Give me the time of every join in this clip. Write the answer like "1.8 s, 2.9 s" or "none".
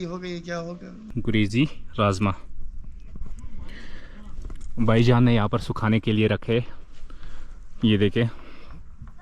1.1 s